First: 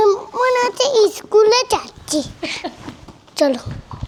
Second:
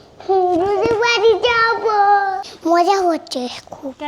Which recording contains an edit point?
second; 1 cut; at 2.5 s

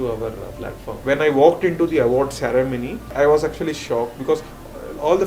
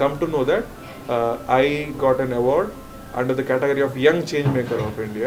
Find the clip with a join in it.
first; 2 cuts; at 0.9 s, 3.0 s

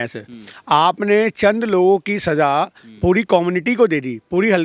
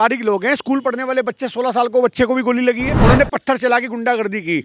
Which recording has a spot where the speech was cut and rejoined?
second; 1 cut; at 2.9 s

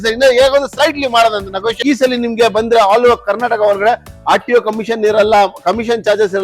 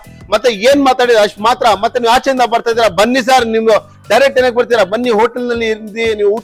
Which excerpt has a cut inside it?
first; 1 cut; at 1.8 s

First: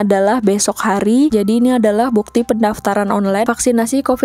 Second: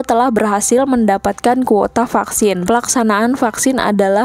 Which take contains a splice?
first; 1 cut; at 1.3 s

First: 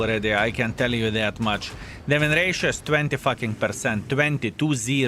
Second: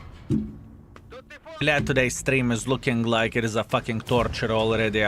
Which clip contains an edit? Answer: second; 1 cut; at 1.5 s

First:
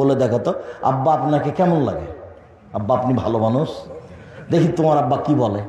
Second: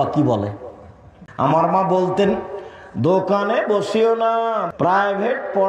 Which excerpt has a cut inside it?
second; 2 cuts; at 1.5 s, 4.6 s

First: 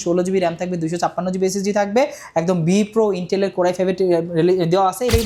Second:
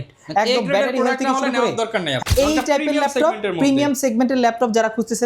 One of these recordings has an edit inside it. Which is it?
second; 1 cut; at 2.2 s

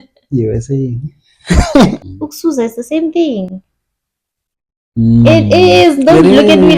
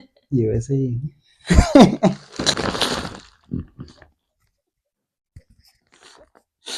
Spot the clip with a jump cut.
first; 1 cut; at 2.0 s

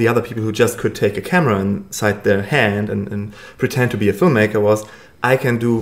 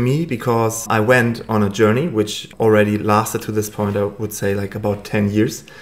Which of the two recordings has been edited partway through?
second; 2 cuts; at 0.8 s, 2.4 s

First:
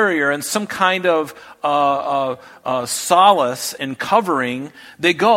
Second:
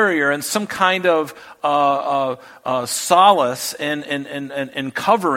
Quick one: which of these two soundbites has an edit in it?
first; 1 cut; at 3.7 s

